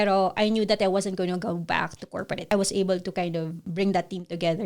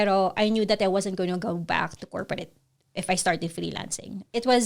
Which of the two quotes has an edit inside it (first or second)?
first